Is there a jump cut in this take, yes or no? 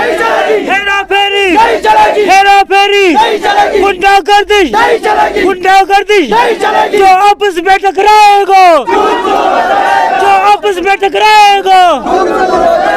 no